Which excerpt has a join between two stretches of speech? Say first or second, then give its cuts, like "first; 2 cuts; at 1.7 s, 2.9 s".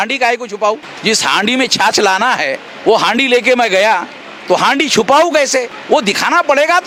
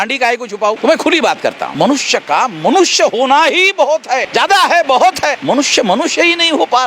second; 4 cuts; at 0.8 s, 1.6 s, 4.3 s, 5.4 s